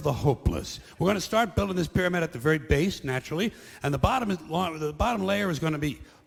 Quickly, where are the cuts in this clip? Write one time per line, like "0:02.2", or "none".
none